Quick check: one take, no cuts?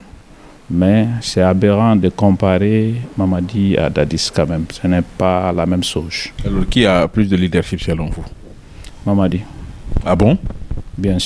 yes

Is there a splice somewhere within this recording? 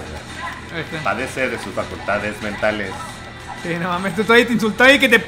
no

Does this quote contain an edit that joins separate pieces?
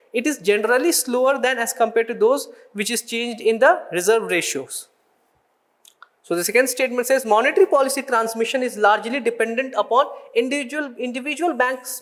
no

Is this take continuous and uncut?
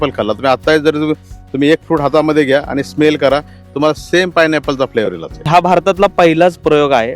no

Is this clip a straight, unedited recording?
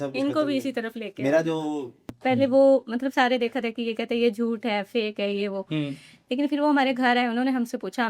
no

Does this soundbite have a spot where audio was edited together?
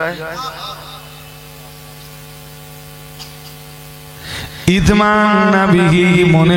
no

